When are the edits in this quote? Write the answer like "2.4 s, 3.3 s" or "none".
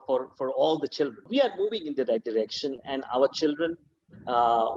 1.2 s

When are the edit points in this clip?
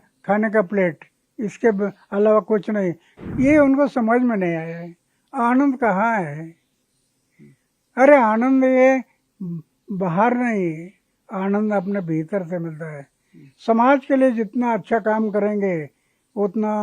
3.1 s

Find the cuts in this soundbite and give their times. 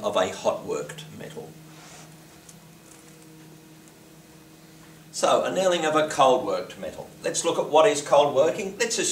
5.0 s

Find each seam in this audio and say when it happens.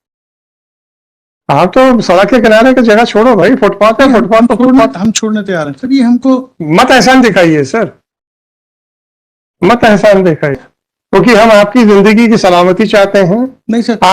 10.7 s

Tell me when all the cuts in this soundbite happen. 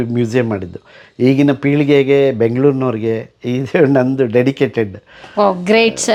none

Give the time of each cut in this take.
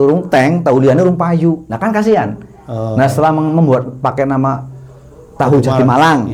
none

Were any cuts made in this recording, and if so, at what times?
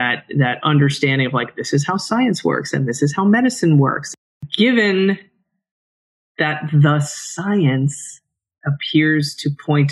4.2 s

